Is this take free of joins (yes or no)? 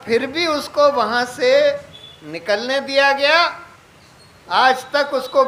yes